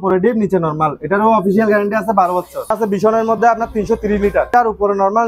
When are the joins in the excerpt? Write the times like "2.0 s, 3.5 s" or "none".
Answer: 2.8 s, 4.5 s